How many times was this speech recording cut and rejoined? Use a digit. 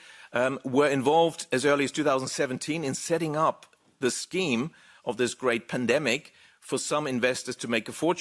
0